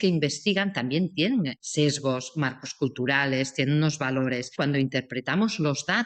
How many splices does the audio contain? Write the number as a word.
two